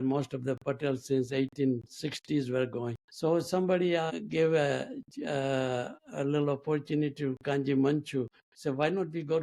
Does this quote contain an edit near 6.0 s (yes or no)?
yes